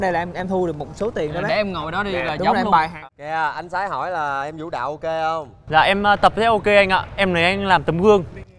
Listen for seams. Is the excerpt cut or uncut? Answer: cut